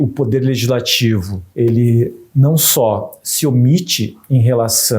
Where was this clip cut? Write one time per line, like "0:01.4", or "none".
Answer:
0:01.4